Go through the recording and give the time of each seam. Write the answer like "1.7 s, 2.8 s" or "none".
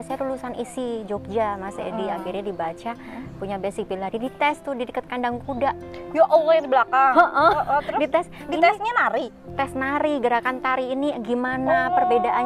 none